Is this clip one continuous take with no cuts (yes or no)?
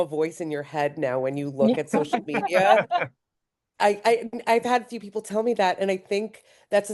yes